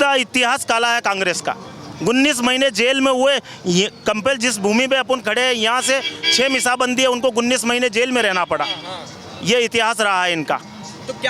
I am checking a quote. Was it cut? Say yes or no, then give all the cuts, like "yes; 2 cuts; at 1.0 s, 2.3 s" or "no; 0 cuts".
no; 0 cuts